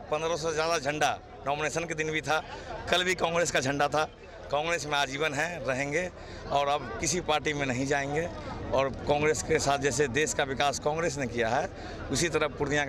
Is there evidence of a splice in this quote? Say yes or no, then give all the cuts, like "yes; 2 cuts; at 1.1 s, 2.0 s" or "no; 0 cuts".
no; 0 cuts